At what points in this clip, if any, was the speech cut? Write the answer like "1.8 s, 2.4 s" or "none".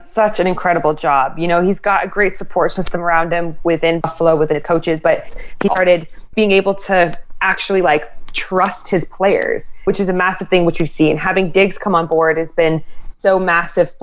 4.0 s, 6.3 s, 9.8 s